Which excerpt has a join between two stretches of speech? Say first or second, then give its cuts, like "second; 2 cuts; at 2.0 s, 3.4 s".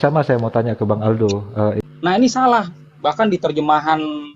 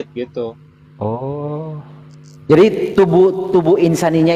first; 1 cut; at 1.8 s